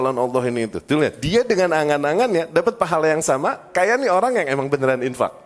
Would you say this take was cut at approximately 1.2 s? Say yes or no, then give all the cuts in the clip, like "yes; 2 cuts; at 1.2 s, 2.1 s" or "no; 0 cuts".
yes; 1 cut; at 1.2 s